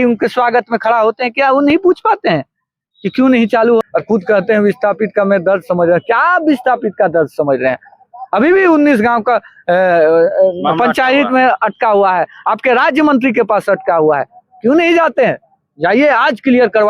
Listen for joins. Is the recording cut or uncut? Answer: cut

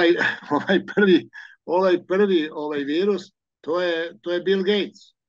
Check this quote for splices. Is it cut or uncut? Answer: uncut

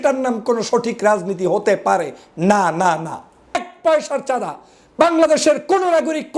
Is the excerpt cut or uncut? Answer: cut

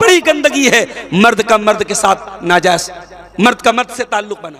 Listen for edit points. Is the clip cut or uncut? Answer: uncut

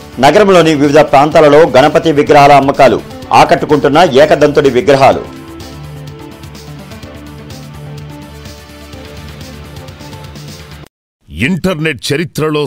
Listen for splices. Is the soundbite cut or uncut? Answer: cut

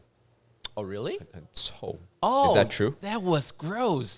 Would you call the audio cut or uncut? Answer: cut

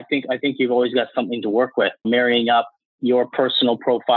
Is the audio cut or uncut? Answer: cut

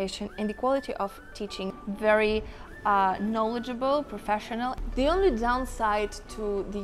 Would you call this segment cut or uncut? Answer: cut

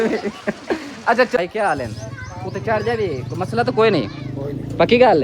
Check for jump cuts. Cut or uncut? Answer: cut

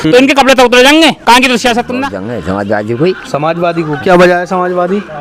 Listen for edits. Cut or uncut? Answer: cut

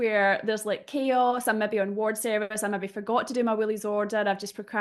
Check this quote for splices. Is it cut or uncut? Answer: uncut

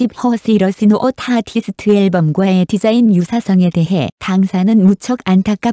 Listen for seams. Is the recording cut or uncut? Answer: uncut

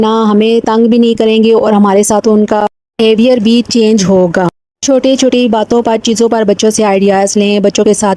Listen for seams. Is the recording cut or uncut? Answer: uncut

